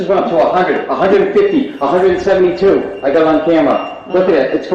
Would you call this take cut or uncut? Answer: uncut